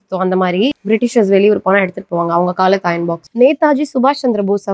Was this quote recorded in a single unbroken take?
no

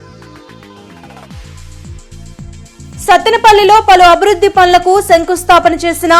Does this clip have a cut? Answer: yes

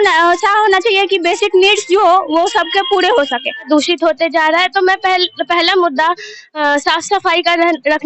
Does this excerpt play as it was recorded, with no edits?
no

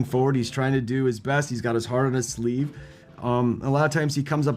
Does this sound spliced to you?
no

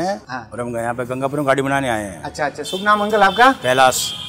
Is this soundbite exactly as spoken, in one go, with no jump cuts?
yes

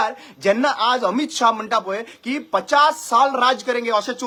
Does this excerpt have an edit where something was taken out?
no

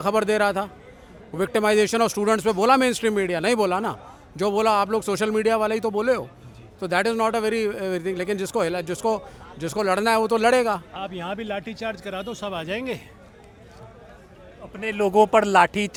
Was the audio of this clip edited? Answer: no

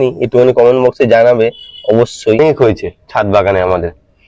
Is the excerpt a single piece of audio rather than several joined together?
no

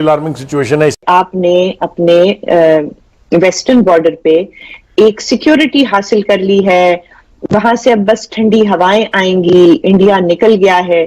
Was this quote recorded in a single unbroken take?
no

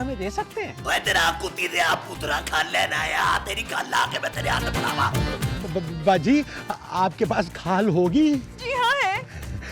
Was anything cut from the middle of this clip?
yes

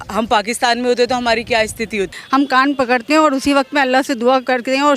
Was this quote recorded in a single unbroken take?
no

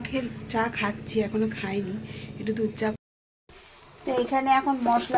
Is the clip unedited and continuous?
no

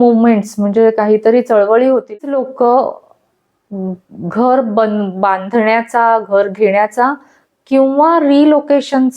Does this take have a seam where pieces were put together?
yes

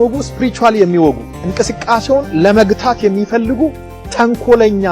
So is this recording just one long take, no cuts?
yes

